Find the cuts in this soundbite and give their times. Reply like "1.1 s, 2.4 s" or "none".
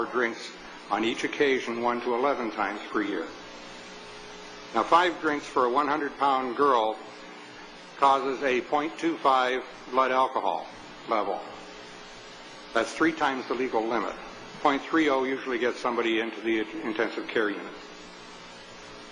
11.2 s